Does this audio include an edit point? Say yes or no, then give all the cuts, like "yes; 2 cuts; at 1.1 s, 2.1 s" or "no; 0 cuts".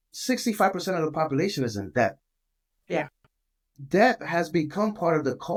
no; 0 cuts